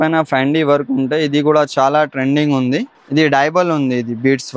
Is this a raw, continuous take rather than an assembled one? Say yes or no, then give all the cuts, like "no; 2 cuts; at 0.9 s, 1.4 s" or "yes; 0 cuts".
no; 1 cut; at 3.0 s